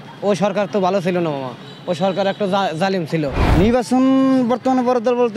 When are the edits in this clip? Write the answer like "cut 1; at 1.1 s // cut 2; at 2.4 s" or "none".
cut 1; at 3.4 s